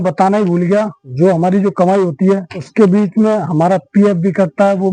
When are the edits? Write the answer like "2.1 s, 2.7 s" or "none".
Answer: 1.0 s, 2.6 s

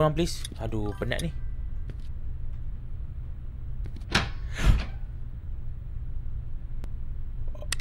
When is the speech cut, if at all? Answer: none

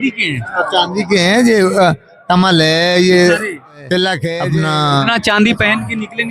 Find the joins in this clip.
4.3 s

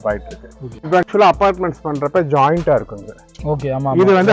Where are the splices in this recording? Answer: 1.1 s

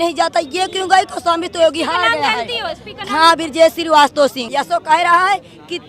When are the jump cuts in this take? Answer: 4.4 s

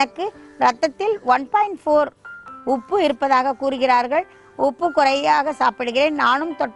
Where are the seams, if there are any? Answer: none

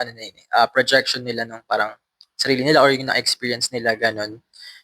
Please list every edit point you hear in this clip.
none

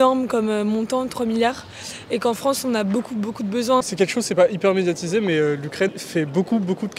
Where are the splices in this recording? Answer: 3.8 s, 6.0 s

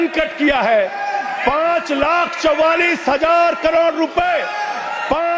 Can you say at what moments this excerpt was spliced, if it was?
none

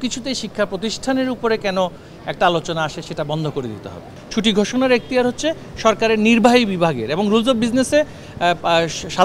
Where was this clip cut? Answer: 4.2 s

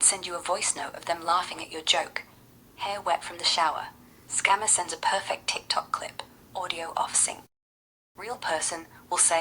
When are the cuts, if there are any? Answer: none

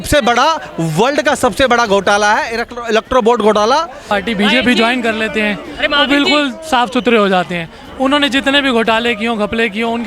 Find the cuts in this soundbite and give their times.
4.1 s

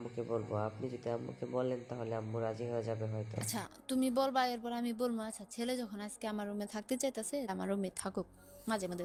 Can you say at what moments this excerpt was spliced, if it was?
none

